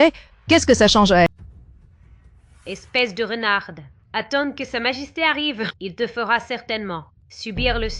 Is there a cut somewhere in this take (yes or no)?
yes